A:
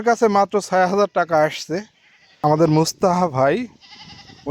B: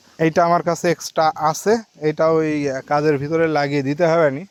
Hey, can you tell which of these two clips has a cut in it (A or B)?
A